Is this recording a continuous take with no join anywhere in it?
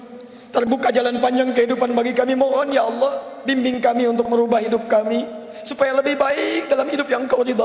yes; 0 cuts

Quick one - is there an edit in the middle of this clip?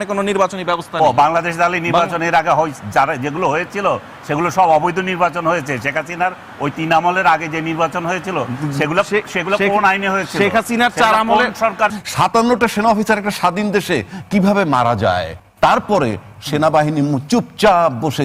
yes; 2 cuts; at 12.0 s, 15.4 s

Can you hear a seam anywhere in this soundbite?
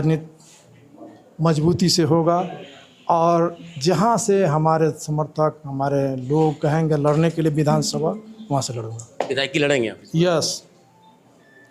no; 0 cuts

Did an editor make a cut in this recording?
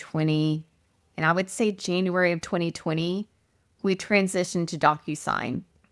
no; 0 cuts

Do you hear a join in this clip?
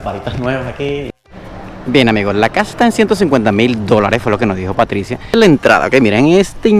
yes; 2 cuts; at 1.1 s, 5.4 s

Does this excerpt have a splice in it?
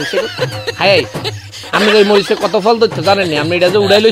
no; 0 cuts

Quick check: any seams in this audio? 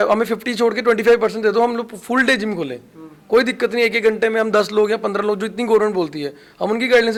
no; 0 cuts

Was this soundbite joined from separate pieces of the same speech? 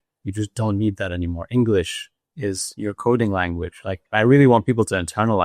yes; 1 cut; at 4.0 s

